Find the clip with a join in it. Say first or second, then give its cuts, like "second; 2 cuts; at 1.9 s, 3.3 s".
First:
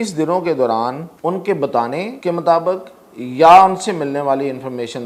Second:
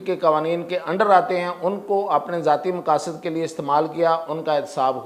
first; 2 cuts; at 1.1 s, 2.1 s